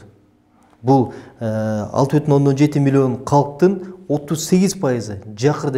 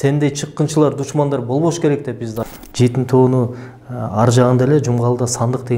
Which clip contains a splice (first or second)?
second